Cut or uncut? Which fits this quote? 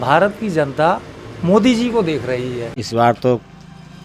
cut